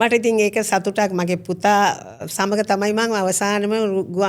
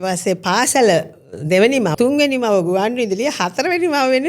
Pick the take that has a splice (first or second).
second